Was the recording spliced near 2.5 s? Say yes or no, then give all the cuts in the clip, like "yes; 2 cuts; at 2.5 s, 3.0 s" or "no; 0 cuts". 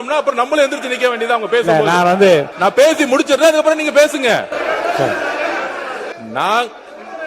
yes; 1 cut; at 2.5 s